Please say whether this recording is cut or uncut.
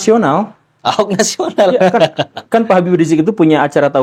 uncut